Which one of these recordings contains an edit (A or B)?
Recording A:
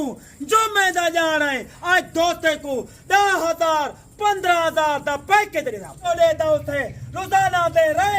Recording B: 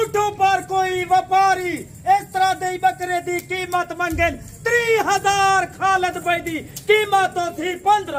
A